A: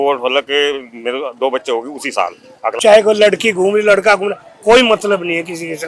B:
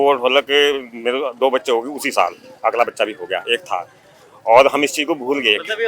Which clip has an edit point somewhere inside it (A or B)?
A